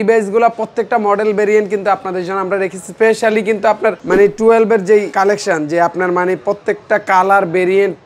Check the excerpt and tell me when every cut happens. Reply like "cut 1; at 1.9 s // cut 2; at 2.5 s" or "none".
cut 1; at 4.0 s // cut 2; at 5.1 s